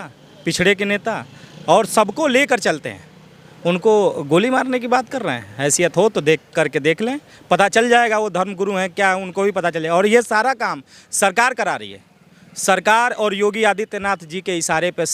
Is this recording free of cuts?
yes; 0 cuts

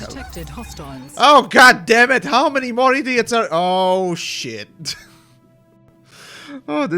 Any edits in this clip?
no; 0 cuts

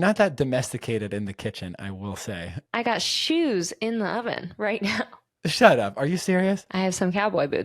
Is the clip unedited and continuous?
no; 2 cuts; at 2.7 s, 5.2 s

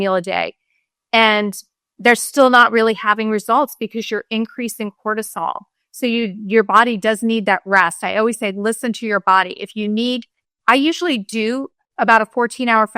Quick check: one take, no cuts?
no; 1 cut; at 11.8 s

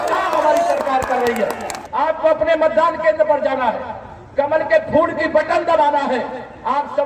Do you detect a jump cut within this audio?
yes; 1 cut; at 1.8 s

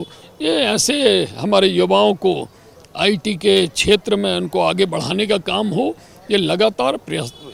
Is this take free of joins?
yes; 0 cuts

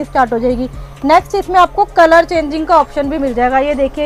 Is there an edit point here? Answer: no; 0 cuts

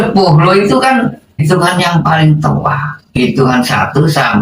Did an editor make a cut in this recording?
yes; 1 cut; at 1.4 s

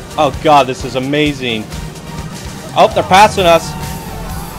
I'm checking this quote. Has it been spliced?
yes; 1 cut; at 2.3 s

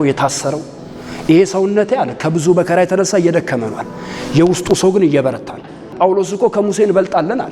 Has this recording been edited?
yes; 1 cut; at 5.9 s

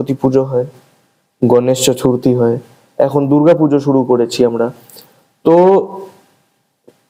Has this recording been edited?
no; 0 cuts

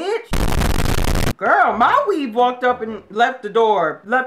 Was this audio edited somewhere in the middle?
yes; 1 cut; at 1.3 s

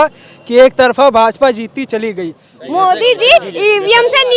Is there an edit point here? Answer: yes; 1 cut; at 2.6 s

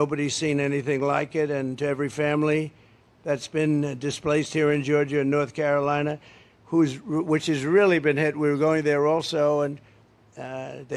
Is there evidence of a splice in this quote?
no; 0 cuts

